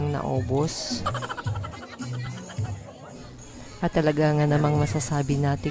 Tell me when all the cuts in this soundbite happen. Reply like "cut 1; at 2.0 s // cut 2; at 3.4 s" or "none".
none